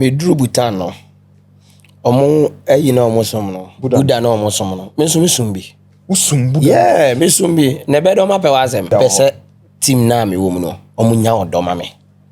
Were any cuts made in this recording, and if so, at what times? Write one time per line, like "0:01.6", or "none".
0:08.9